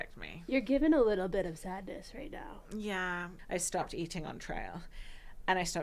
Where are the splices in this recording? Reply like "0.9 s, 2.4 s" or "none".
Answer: 3.3 s